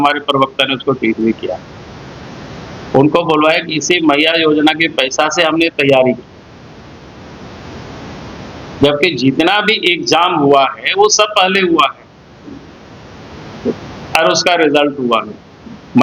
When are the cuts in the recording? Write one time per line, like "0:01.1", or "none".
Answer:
none